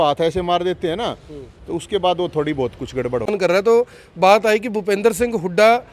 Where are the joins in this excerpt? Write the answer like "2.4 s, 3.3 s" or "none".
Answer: 3.3 s